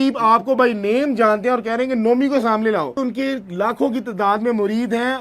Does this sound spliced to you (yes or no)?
yes